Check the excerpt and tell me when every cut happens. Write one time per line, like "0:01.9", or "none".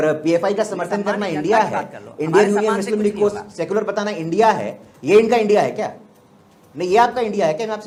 none